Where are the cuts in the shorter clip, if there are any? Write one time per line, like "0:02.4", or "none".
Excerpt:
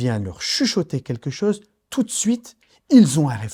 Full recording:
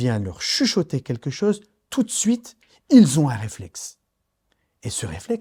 none